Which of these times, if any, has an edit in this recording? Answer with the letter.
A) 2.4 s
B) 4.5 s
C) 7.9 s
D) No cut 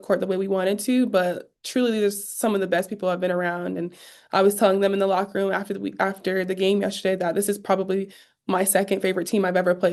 D